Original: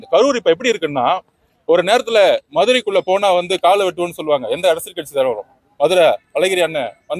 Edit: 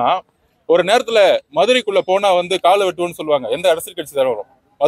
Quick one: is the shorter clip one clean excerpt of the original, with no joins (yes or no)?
yes